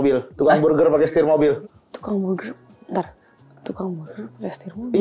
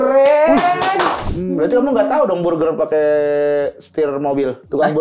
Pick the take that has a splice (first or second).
second